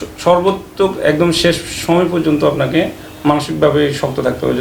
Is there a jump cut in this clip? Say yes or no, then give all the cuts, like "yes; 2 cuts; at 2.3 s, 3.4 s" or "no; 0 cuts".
no; 0 cuts